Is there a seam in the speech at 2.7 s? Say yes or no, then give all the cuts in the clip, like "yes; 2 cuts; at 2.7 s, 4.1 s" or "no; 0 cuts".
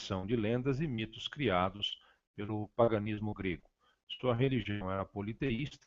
no; 0 cuts